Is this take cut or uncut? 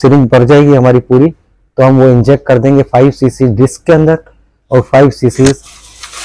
uncut